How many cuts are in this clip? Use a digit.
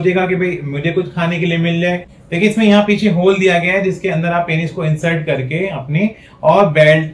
1